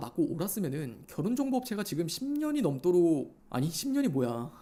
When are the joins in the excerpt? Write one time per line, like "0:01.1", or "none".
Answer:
none